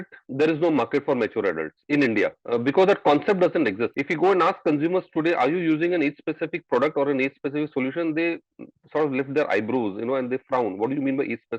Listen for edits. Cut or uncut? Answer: cut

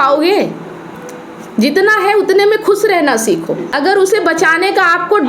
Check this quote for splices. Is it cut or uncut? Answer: cut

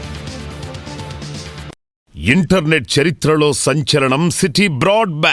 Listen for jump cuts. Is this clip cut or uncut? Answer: cut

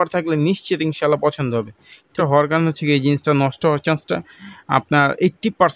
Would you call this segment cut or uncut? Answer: cut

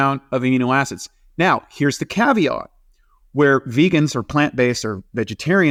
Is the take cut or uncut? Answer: uncut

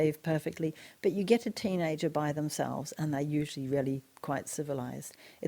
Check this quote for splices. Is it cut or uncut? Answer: uncut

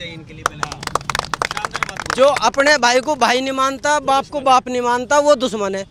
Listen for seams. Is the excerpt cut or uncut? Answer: uncut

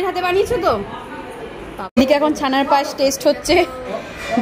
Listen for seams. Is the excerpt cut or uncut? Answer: cut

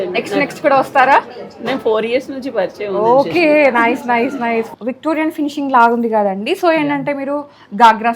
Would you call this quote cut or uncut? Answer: cut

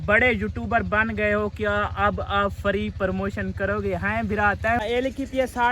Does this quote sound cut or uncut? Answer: cut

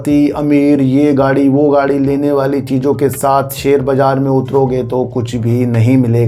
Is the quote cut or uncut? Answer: uncut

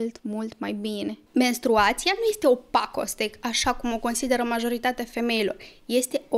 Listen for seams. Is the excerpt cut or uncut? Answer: cut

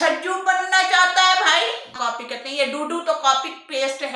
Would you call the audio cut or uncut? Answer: cut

